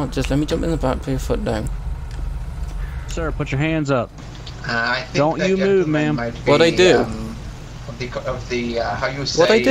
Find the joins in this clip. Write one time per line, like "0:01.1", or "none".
0:03.0